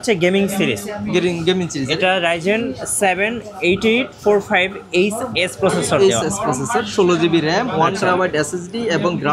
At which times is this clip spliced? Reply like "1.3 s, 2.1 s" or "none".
none